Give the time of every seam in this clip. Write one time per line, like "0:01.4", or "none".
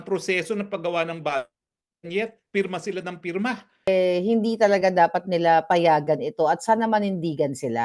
0:03.9